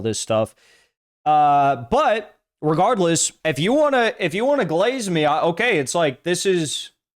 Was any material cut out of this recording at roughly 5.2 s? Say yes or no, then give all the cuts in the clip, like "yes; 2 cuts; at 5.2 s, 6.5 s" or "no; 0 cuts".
no; 1 cut; at 3.3 s